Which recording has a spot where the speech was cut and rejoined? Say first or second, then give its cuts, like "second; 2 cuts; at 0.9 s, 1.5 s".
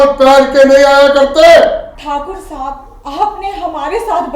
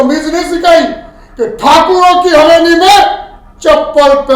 first; 1 cut; at 1.9 s